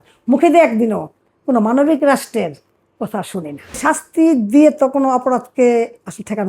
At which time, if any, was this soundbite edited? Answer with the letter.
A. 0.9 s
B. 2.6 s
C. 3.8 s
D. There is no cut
C